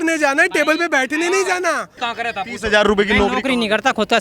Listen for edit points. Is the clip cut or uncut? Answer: cut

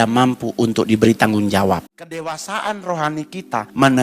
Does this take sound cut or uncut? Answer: cut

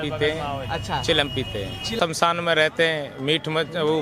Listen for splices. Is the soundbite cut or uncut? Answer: cut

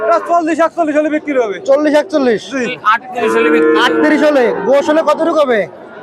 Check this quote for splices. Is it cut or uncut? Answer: cut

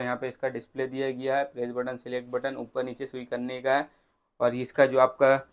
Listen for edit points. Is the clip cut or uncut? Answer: uncut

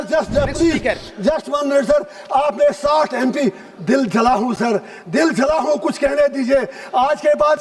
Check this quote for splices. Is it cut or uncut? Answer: uncut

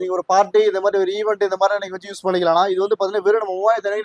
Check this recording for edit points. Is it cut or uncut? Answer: uncut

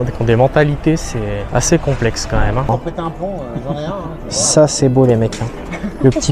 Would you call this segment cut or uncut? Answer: cut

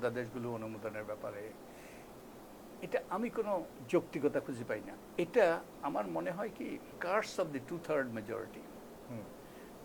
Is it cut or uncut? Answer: cut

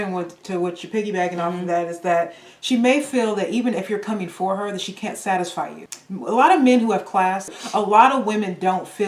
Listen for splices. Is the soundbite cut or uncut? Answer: cut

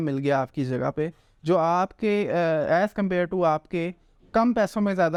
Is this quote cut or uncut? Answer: uncut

